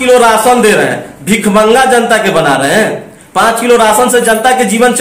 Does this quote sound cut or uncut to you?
uncut